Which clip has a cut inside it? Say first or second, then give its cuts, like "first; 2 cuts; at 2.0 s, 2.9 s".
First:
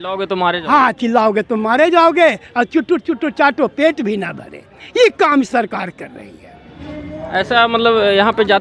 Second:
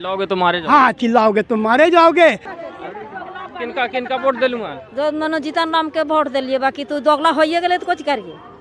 second; 1 cut; at 2.4 s